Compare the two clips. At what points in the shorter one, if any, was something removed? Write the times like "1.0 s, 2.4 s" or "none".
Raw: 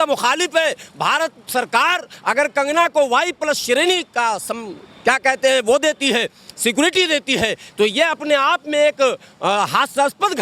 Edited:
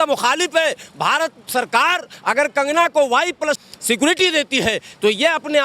3.6 s